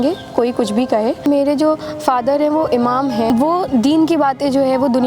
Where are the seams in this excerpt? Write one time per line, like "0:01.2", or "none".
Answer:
0:01.3
0:03.5